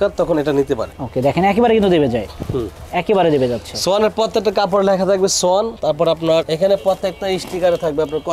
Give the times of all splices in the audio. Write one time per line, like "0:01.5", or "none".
none